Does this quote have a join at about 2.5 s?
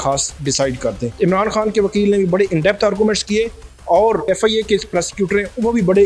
no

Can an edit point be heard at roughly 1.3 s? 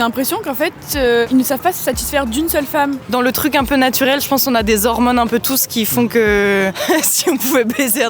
yes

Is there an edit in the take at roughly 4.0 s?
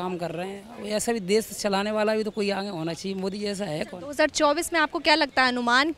no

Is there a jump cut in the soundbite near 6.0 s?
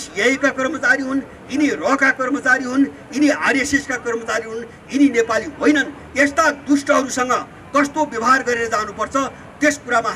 no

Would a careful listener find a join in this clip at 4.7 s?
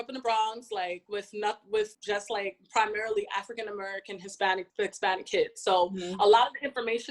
yes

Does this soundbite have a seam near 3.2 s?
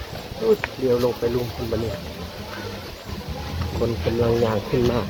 no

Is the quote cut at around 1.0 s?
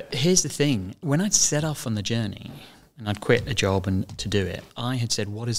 yes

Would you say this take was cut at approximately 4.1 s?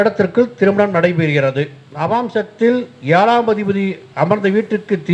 no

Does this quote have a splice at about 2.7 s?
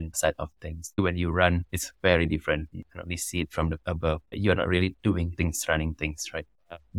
yes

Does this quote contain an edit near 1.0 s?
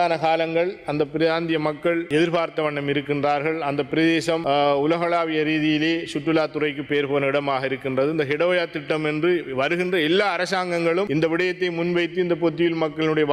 no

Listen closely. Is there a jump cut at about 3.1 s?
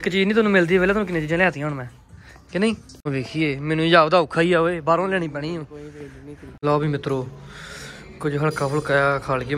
yes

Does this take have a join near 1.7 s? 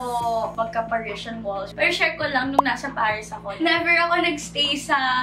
yes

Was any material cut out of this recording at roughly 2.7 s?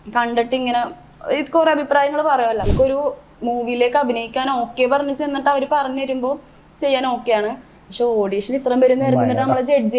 yes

